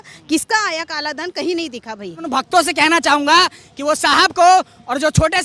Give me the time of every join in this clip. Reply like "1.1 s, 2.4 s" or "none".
2.2 s